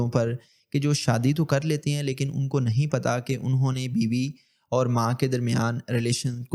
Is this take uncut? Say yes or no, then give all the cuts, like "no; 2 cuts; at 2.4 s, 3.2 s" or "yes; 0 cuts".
yes; 0 cuts